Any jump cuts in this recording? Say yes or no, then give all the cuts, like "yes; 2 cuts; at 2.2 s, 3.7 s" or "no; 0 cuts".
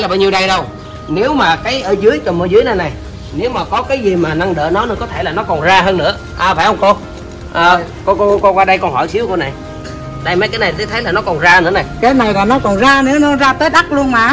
no; 0 cuts